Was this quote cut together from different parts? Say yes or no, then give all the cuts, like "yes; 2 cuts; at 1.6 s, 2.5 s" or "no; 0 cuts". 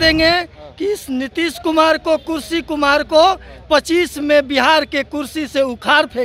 no; 0 cuts